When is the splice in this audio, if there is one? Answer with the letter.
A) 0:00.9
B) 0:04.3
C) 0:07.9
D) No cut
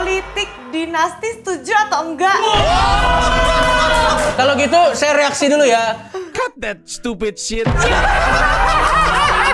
B